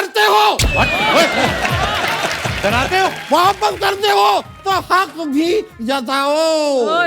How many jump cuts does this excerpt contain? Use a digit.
1